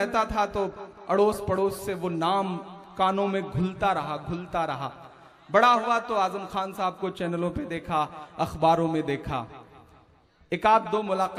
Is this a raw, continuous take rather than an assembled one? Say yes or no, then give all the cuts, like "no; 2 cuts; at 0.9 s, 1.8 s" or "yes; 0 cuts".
yes; 0 cuts